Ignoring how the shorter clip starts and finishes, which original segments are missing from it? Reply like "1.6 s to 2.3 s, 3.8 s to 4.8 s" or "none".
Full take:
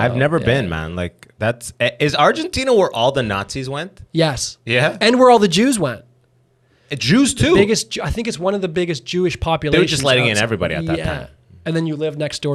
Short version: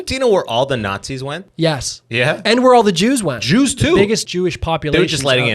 3.9 s to 4.0 s, 6.0 s to 7.0 s, 7.9 s to 9.1 s